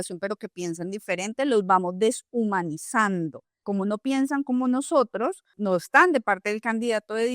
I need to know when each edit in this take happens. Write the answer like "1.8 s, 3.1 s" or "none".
3.6 s, 5.6 s